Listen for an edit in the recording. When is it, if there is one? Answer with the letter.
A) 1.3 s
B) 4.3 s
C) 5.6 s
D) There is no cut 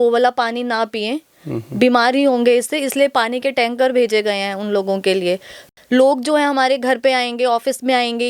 C